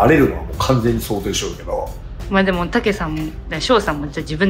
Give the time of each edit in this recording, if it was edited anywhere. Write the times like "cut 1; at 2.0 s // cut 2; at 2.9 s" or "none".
none